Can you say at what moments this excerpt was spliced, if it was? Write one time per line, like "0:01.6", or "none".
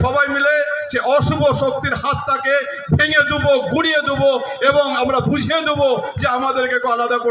none